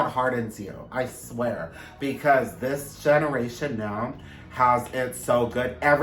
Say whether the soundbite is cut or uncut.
uncut